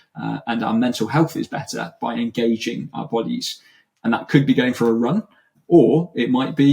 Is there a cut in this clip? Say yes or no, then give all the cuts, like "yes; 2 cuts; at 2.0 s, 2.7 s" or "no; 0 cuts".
yes; 1 cut; at 5.6 s